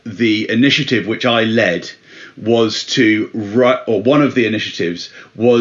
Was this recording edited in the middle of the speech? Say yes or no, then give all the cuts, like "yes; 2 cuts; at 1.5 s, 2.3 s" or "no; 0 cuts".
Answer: no; 0 cuts